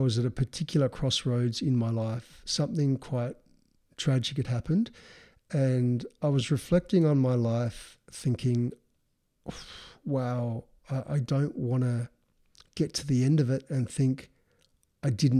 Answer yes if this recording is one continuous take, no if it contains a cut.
yes